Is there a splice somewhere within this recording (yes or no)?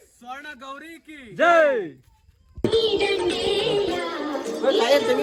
no